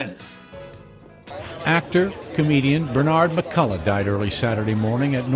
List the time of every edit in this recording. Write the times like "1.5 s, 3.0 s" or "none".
1.3 s